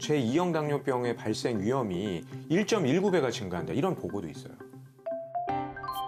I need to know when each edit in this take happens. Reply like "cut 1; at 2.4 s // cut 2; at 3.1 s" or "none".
none